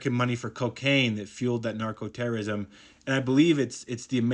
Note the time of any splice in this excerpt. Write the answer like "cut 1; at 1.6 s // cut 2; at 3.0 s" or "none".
none